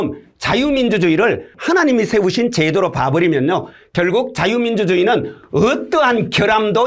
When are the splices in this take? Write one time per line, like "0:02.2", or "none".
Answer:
none